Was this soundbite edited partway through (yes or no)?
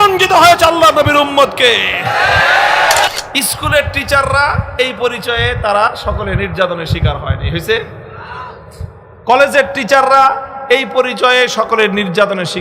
yes